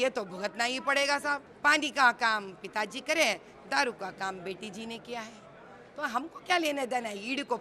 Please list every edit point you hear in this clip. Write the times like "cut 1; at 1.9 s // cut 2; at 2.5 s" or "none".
cut 1; at 1.5 s

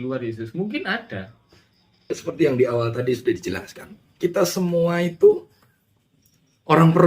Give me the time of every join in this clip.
cut 1; at 2.2 s

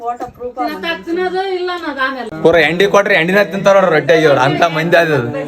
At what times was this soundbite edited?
cut 1; at 2.3 s

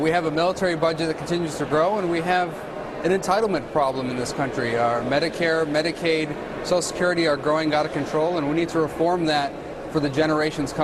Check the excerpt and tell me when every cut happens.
cut 1; at 0.9 s

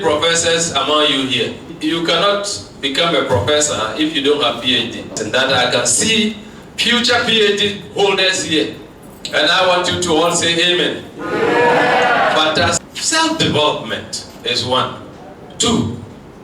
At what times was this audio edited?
cut 1; at 1.7 s // cut 2; at 5.2 s // cut 3; at 12.9 s

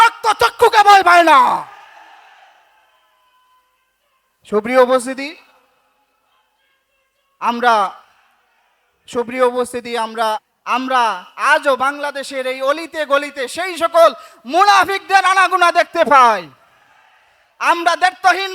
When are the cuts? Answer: cut 1; at 10.5 s

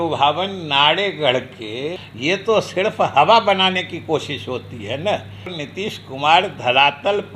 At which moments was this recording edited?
cut 1; at 2.0 s // cut 2; at 5.7 s

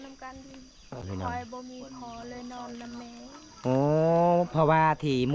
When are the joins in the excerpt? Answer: cut 1; at 1.0 s

